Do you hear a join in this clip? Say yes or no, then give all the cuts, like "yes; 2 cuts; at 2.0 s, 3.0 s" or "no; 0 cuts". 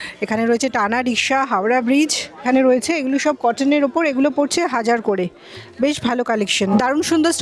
yes; 2 cuts; at 2.4 s, 6.7 s